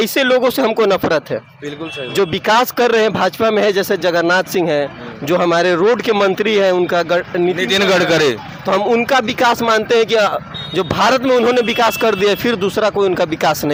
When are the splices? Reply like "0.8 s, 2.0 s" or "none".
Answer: none